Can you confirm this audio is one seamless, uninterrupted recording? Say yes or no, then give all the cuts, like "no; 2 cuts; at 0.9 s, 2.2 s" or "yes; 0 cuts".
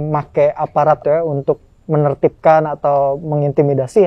no; 1 cut; at 1.0 s